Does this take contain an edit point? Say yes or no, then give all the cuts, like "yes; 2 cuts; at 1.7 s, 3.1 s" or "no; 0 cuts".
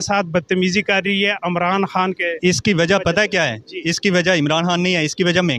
no; 0 cuts